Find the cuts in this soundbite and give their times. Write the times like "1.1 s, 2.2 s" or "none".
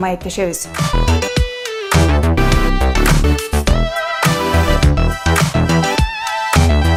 none